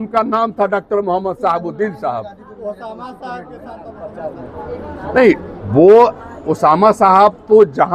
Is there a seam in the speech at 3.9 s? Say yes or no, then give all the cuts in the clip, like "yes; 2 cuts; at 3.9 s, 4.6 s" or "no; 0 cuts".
yes; 1 cut; at 3.9 s